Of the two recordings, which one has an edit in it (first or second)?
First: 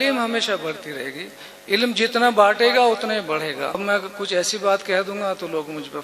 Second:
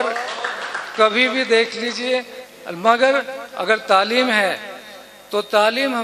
first